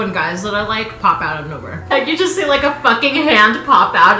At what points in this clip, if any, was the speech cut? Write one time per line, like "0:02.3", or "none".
0:01.9